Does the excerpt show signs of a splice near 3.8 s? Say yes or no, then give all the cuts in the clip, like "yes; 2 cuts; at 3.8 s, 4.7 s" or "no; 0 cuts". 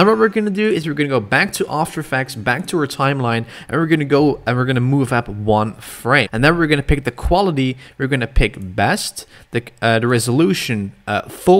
no; 1 cut; at 6.3 s